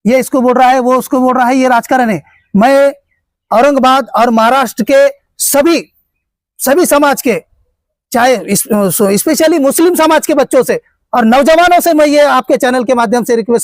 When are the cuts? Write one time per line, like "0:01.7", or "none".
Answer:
none